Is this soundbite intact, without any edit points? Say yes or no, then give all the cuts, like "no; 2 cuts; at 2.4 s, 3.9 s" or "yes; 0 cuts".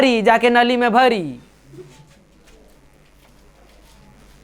yes; 0 cuts